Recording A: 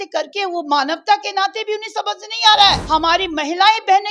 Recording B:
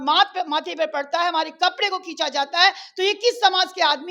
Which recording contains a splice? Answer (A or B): A